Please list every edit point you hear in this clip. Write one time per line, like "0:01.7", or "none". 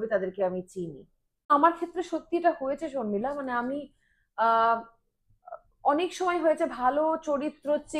0:01.5